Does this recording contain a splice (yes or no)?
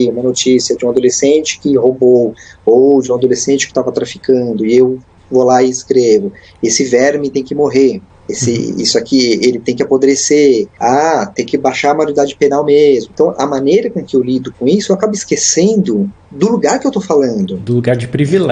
no